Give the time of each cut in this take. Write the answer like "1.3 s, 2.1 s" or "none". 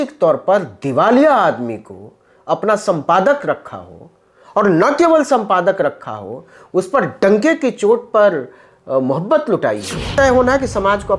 10.1 s